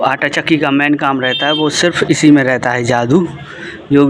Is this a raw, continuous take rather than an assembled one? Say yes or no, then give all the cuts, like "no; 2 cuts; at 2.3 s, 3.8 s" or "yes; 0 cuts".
yes; 0 cuts